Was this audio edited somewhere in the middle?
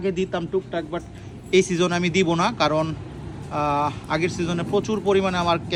no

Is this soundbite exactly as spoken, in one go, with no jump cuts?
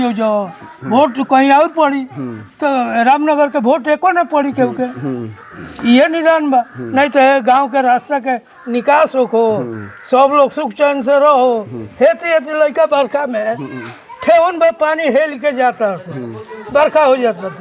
yes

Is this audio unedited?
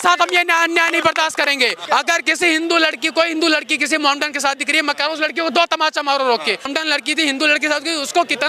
no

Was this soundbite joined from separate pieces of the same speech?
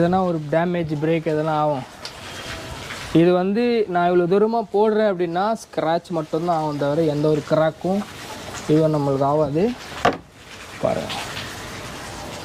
no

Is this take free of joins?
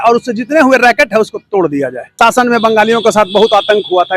no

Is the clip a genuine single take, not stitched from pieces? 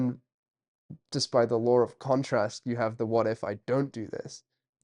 yes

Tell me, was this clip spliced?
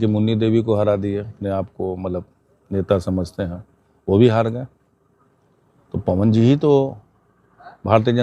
yes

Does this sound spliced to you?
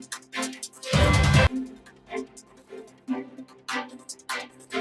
no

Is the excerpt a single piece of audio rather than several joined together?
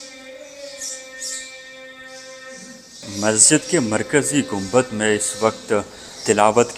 no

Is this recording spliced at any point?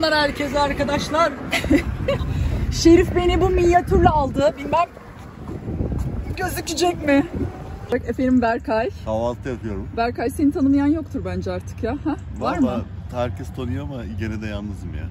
yes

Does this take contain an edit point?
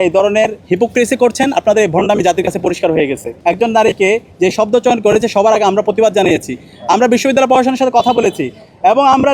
yes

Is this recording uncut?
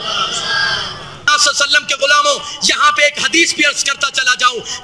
no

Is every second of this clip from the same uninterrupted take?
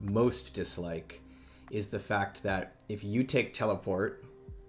yes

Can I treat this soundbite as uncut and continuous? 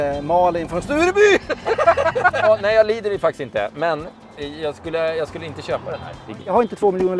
no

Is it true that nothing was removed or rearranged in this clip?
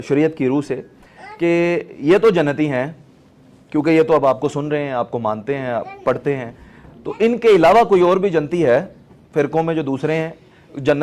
yes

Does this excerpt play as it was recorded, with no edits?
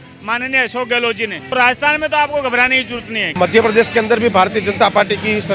no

